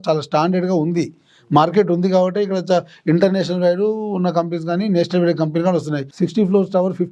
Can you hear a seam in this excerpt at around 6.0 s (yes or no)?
yes